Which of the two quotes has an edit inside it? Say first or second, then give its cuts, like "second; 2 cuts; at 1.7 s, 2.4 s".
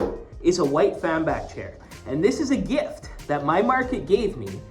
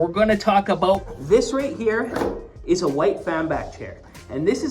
second; 1 cut; at 1.1 s